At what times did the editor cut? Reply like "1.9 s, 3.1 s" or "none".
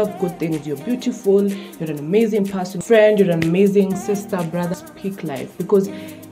2.8 s, 4.8 s